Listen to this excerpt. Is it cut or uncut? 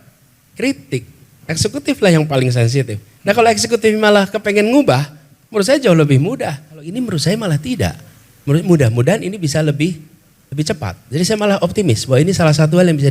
cut